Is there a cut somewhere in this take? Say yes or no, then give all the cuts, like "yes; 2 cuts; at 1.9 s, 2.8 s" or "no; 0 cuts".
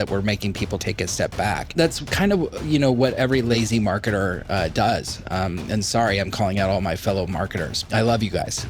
yes; 4 cuts; at 0.8 s, 1.8 s, 3.3 s, 7.8 s